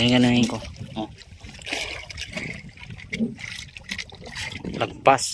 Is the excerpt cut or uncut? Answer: cut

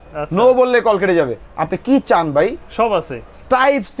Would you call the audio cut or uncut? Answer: uncut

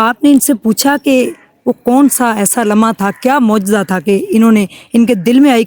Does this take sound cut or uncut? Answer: uncut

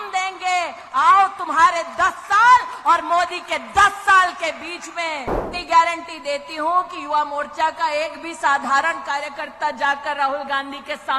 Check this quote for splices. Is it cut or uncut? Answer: cut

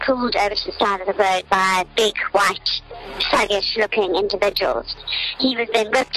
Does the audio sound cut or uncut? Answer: uncut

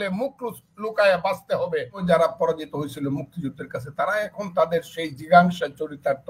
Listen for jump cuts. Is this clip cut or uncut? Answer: cut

